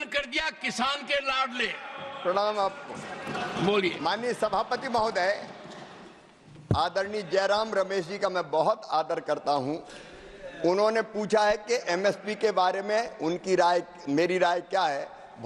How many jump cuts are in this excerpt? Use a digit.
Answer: 0